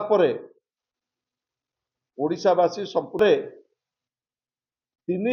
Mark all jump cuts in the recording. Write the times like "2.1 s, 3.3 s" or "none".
3.2 s